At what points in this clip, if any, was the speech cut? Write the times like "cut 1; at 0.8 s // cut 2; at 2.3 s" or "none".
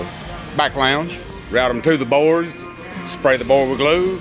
cut 1; at 1.3 s